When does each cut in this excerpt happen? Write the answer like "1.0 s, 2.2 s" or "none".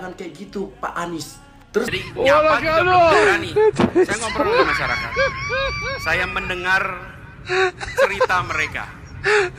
1.9 s